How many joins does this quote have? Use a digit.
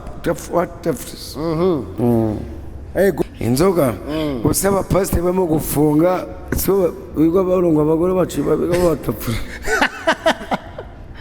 1